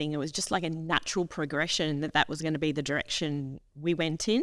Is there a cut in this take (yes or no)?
no